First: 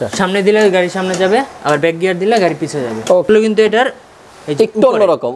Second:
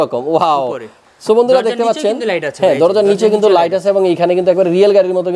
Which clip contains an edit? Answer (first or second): first